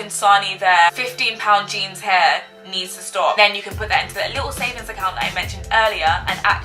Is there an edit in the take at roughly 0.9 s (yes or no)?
yes